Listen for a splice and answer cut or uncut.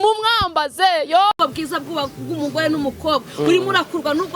cut